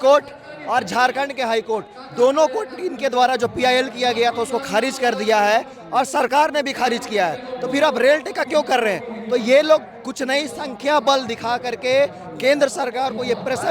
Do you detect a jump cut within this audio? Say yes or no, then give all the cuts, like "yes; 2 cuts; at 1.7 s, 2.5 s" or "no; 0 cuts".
no; 0 cuts